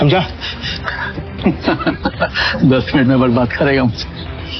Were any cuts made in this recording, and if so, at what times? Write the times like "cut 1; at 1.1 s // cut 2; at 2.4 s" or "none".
none